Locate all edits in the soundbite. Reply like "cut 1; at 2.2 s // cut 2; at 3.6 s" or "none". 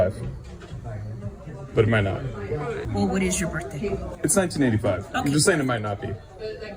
cut 1; at 2.8 s